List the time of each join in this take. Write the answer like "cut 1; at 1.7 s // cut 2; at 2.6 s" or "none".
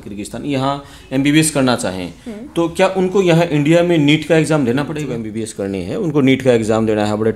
cut 1; at 5.4 s